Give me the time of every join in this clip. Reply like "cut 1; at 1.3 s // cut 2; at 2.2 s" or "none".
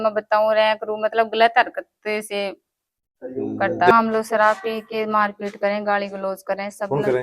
cut 1; at 3.9 s